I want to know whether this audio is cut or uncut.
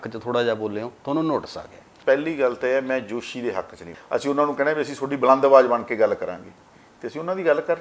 cut